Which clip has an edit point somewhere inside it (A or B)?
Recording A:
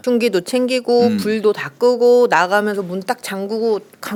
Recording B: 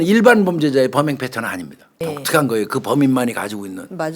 B